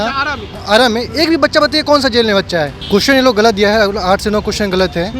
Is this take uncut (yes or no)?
no